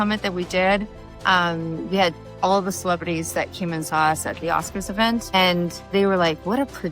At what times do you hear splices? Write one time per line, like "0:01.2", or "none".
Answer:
0:05.3

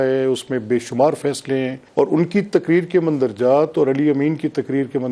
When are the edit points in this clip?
0:01.8

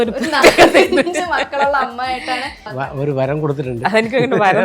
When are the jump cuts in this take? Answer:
0:02.7

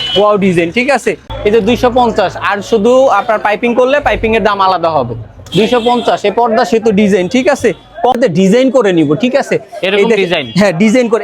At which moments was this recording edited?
0:01.3
0:08.2

